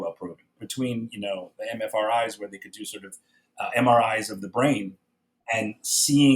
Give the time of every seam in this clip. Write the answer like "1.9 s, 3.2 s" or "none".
4.9 s